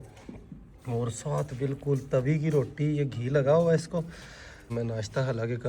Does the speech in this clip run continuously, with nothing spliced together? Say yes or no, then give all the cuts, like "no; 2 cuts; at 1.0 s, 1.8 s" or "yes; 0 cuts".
no; 1 cut; at 4.6 s